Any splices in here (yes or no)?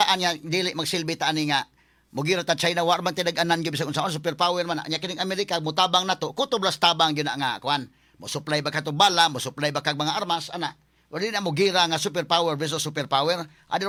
no